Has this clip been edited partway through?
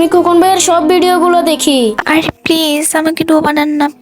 yes; 1 cut; at 2.0 s

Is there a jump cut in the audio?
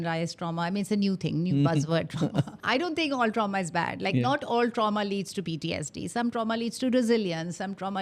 yes; 1 cut; at 2.6 s

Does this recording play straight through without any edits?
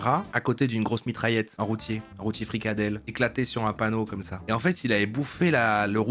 yes; 0 cuts

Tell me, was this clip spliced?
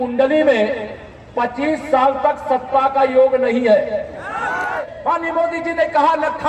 yes; 1 cut; at 4.8 s

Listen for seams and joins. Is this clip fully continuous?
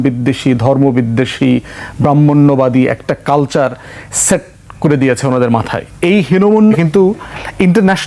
no; 1 cut; at 6.8 s

